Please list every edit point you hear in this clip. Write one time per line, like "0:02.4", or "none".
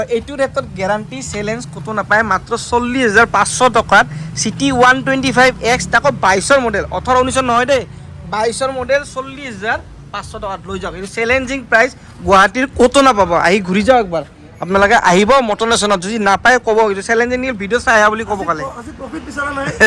none